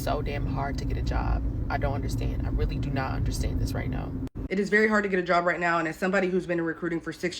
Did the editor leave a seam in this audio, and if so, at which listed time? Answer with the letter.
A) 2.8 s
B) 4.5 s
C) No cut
B